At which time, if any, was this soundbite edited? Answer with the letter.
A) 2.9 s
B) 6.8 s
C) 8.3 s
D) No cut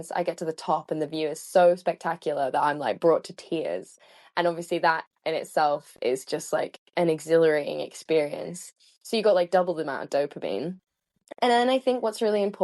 D